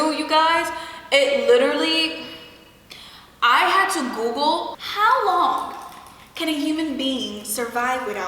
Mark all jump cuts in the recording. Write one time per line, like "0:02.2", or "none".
0:04.8

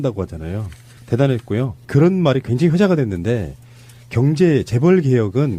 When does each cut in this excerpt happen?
0:01.8

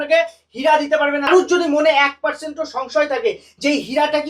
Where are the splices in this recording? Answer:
0:01.3

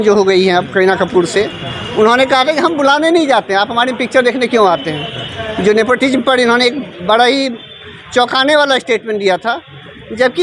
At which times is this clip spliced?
none

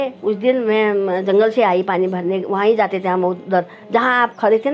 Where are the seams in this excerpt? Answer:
none

